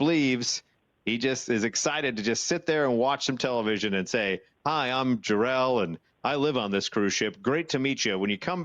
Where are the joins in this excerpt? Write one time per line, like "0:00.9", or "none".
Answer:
none

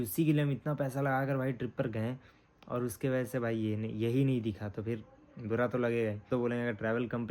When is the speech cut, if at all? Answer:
0:06.3

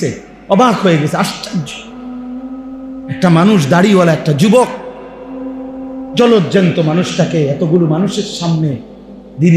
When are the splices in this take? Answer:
0:01.8
0:03.2

